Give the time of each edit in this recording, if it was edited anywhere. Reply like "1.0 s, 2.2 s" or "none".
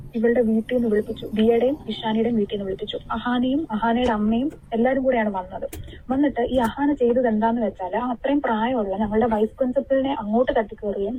none